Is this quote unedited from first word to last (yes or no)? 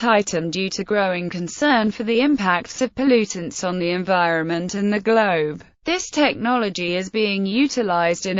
no